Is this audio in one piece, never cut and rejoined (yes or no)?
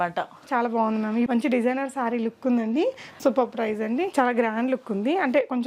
no